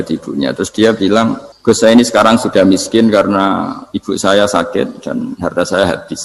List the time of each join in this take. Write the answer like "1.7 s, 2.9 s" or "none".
1.5 s